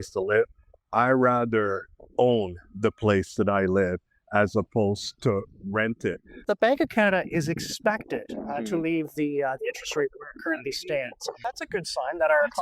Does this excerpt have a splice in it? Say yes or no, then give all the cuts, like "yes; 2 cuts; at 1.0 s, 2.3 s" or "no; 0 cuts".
yes; 2 cuts; at 6.4 s, 11.4 s